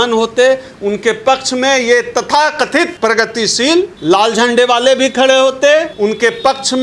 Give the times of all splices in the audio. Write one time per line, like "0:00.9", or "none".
0:02.9
0:03.9
0:05.9